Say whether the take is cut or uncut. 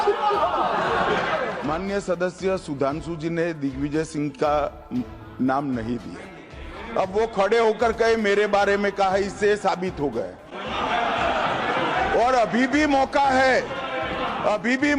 cut